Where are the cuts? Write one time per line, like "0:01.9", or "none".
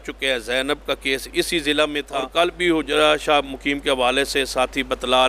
0:02.2